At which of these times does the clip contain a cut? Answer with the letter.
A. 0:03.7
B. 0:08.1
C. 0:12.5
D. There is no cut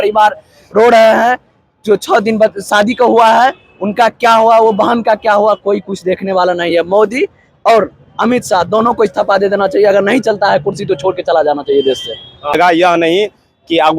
C